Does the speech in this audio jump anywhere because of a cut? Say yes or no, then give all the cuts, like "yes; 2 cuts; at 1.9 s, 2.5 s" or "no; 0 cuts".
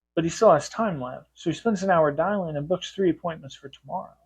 no; 0 cuts